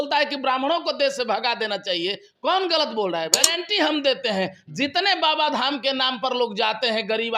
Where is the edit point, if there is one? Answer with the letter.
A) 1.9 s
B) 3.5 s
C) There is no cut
B